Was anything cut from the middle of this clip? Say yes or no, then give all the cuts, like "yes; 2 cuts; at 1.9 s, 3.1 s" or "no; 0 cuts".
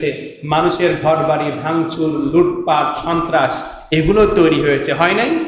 no; 0 cuts